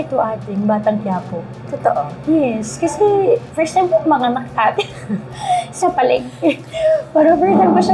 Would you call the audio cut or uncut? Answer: uncut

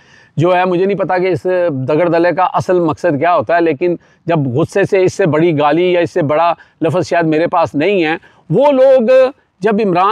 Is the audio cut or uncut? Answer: uncut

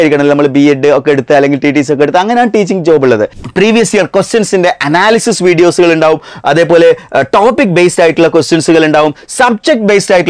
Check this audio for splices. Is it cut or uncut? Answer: cut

